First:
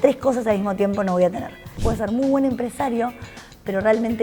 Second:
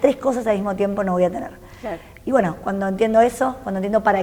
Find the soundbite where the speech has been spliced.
first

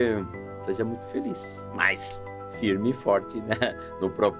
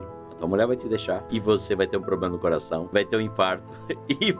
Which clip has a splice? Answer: second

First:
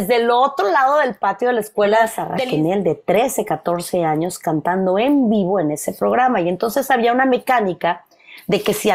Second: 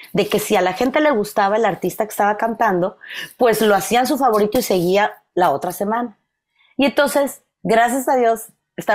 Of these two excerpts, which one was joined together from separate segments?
first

